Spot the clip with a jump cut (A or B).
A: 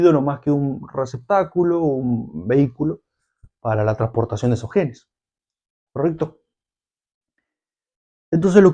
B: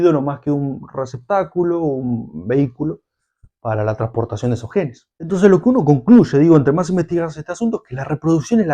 B